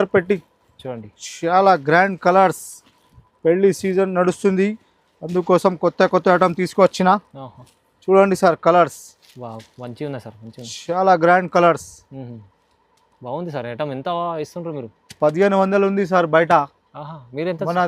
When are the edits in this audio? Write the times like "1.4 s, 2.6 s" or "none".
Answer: none

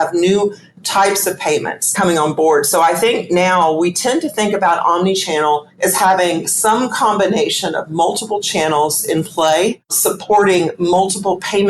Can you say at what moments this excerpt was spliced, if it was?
9.9 s

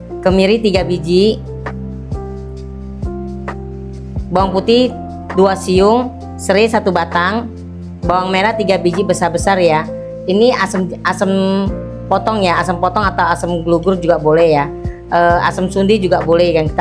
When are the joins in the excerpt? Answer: 1.4 s, 4.3 s

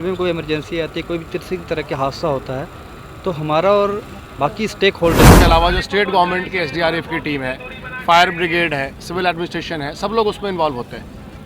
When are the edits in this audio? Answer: 5.4 s

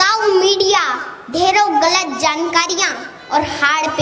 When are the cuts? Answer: none

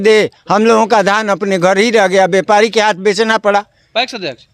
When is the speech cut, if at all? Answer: none

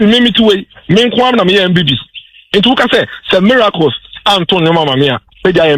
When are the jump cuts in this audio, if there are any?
none

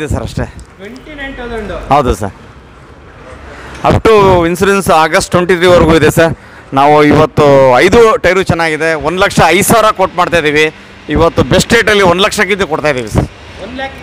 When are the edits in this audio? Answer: none

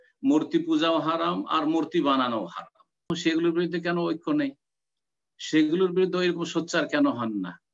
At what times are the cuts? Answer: 3.1 s

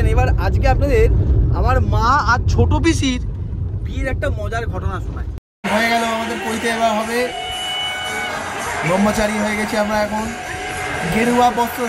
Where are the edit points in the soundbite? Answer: 5.5 s

